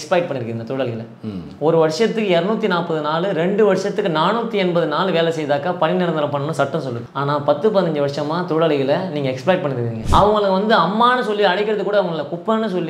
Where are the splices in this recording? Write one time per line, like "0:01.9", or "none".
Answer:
0:07.0
0:09.9

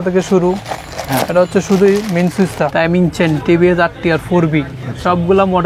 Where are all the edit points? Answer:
0:02.7

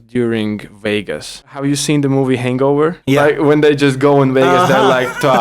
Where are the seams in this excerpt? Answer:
0:01.6

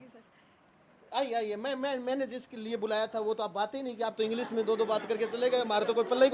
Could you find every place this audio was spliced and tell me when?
none

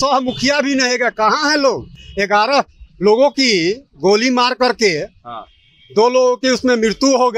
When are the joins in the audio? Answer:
none

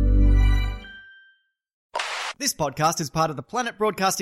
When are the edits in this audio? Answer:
0:02.0

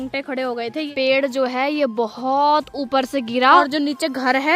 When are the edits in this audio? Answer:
0:00.9
0:03.7

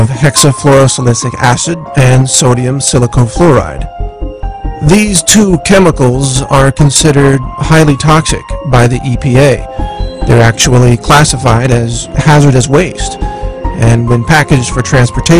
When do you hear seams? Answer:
0:03.5

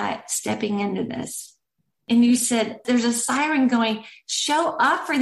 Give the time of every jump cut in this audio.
0:02.8

